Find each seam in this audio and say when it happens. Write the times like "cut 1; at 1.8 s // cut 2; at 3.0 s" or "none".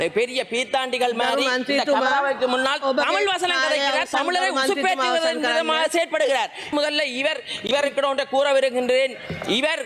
cut 1; at 6.7 s